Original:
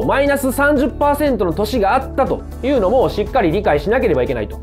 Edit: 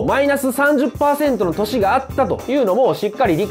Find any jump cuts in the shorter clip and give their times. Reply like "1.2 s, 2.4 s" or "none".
2.4 s